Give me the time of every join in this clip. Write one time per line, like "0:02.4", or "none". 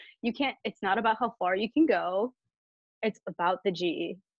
none